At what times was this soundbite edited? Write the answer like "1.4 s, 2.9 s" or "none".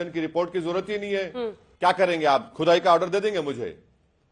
1.6 s